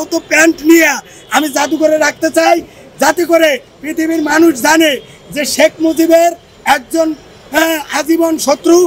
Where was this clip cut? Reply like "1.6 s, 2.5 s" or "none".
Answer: none